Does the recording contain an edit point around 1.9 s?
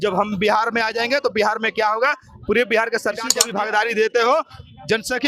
no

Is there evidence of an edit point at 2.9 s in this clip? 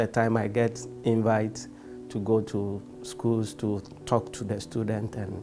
no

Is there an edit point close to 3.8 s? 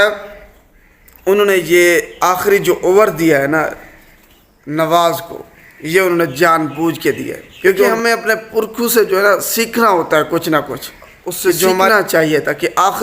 no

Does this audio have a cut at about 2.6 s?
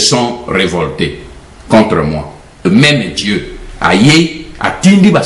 yes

